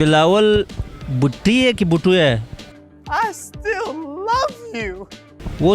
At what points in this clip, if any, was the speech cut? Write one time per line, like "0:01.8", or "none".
none